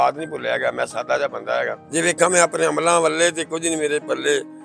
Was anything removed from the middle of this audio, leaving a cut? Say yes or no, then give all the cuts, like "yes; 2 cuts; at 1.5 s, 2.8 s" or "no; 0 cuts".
yes; 1 cut; at 1.8 s